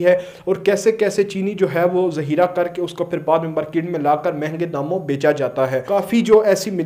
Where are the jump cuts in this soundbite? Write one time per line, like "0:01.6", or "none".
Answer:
0:05.8